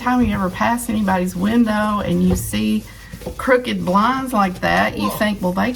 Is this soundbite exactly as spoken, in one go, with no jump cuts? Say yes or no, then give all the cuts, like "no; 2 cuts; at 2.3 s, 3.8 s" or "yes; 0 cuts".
yes; 0 cuts